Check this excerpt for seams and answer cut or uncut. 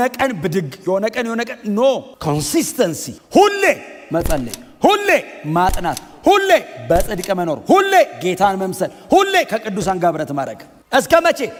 uncut